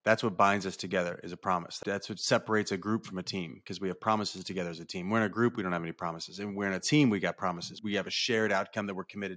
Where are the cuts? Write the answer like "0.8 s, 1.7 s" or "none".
1.7 s, 7.8 s